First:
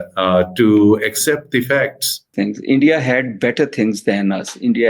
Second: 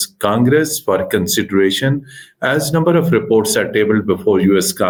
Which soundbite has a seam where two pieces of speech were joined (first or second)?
first